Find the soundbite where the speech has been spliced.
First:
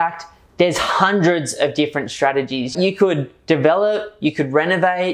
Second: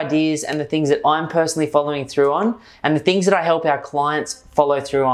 first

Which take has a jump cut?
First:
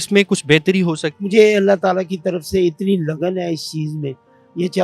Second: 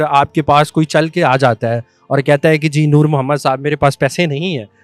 first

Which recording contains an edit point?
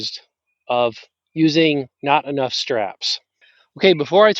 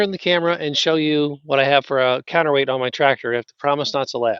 first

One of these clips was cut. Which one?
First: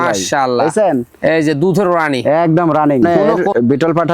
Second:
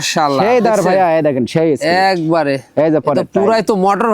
first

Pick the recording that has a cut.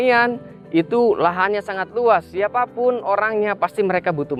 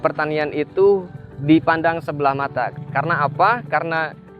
second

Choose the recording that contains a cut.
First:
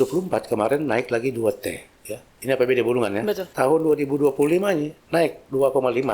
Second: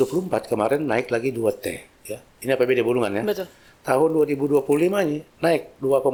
first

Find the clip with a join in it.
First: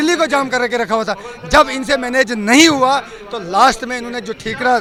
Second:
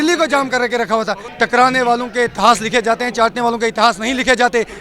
second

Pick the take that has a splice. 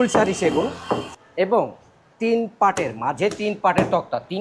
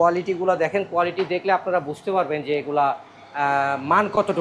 first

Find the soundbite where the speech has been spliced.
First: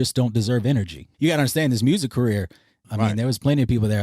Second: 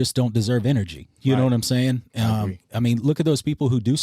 first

